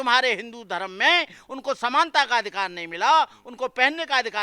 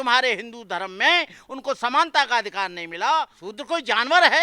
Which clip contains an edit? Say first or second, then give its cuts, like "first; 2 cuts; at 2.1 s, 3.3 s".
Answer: second; 1 cut; at 3.4 s